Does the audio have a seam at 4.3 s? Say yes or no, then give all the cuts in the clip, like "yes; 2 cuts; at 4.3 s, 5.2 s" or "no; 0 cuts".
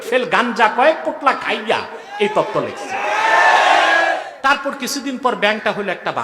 yes; 1 cut; at 4.3 s